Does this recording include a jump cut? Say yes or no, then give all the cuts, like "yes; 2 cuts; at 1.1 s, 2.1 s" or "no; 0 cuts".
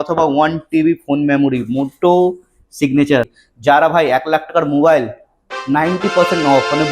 yes; 1 cut; at 3.4 s